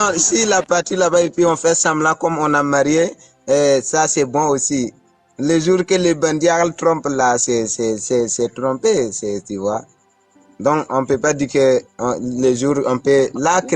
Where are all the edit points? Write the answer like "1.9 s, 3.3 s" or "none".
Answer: none